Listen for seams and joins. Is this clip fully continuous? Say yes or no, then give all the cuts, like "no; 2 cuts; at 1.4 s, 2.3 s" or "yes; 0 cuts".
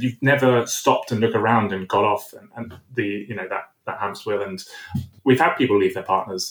no; 1 cut; at 5.1 s